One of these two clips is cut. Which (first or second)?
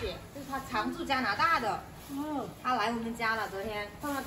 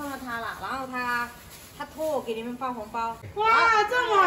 second